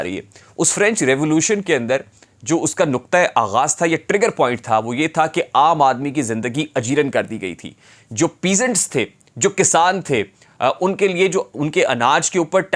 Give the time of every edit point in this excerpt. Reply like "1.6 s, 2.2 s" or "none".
none